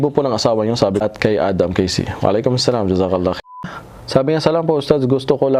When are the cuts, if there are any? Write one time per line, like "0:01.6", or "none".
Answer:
0:01.0
0:03.6

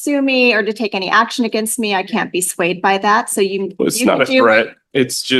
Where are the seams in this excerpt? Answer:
none

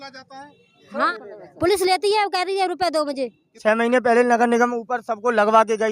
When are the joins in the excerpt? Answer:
0:01.1
0:03.5

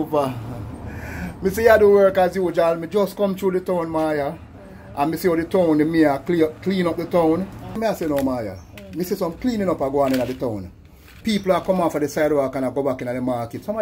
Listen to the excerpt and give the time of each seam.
0:07.8

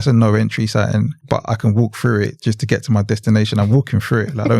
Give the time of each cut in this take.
0:01.2

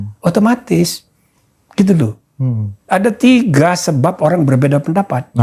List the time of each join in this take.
none

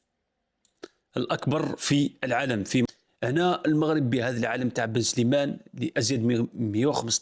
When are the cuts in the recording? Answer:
0:02.9

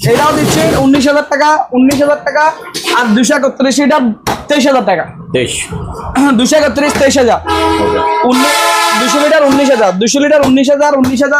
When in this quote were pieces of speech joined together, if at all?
none

